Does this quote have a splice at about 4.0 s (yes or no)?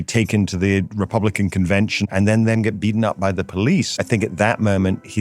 yes